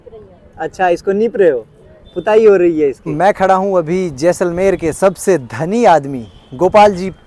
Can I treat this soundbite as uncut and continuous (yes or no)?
no